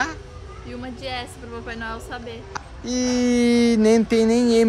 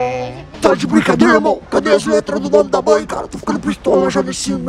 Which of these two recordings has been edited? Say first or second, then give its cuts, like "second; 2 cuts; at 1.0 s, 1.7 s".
first; 1 cut; at 2.4 s